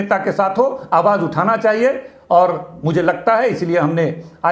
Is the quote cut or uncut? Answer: uncut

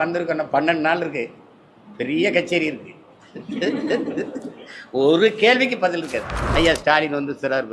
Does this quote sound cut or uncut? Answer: cut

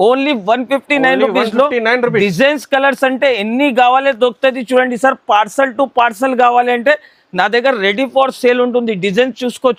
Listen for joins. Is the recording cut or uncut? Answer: uncut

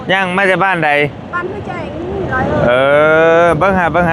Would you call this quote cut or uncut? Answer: uncut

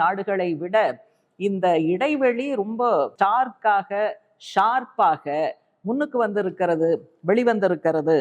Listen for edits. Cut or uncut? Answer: cut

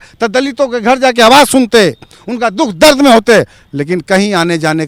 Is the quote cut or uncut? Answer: uncut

